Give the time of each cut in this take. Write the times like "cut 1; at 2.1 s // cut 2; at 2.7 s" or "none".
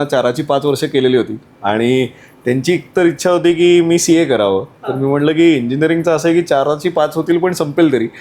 none